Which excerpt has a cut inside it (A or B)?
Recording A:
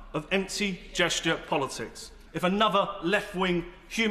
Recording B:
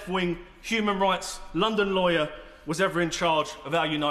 A